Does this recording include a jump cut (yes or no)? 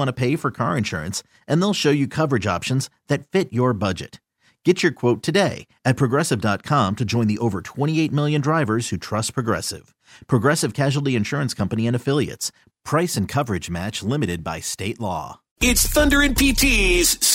yes